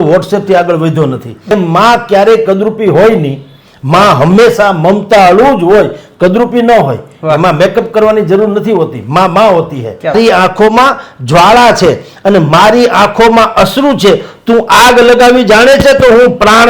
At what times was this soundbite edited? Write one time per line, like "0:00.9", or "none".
0:01.5
0:10.2